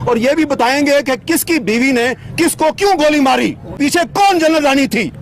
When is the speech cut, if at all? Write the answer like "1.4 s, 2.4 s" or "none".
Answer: 3.8 s

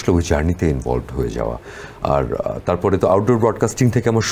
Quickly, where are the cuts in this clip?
none

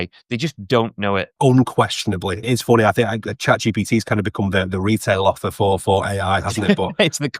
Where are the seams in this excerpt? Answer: 1.3 s, 2.4 s

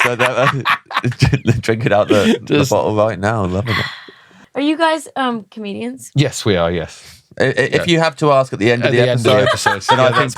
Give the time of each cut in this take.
4.4 s

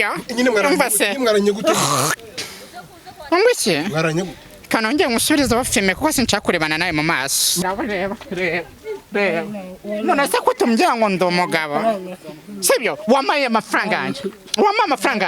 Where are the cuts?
7.6 s

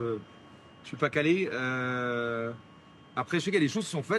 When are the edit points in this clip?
none

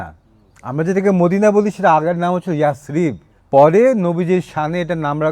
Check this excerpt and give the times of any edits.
3.3 s

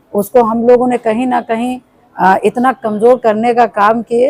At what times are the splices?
none

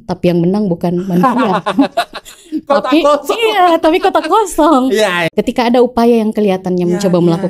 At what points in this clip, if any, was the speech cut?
5.2 s

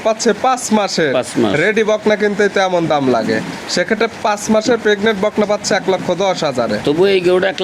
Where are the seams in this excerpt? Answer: none

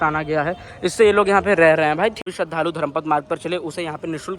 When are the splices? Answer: 2.2 s

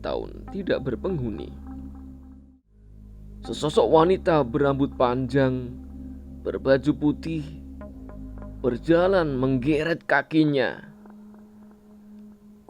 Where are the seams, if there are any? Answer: 2.5 s

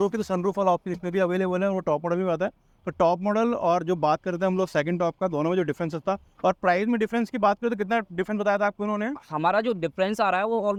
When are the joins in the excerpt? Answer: none

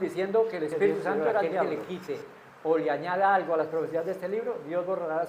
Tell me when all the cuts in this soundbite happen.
1.7 s

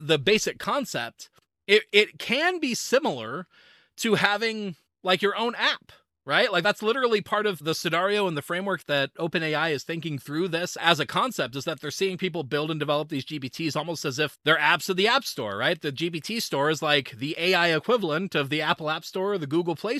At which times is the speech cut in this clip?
7.6 s

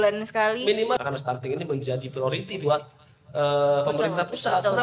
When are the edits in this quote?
1.0 s

